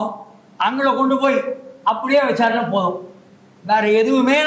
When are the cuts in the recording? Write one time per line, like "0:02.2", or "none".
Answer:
none